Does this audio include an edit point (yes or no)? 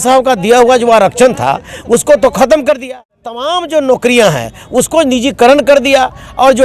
yes